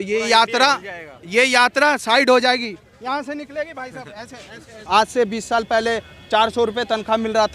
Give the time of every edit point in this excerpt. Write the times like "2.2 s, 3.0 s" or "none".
4.8 s